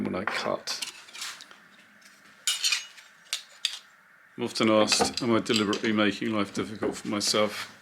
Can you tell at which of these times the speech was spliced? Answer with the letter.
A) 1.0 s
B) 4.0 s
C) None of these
A